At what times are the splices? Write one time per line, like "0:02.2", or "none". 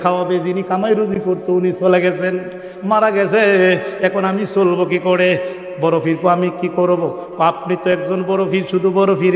none